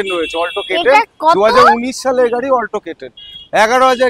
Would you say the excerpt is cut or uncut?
uncut